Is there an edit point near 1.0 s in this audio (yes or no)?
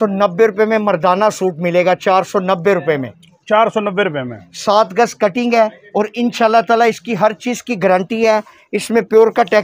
no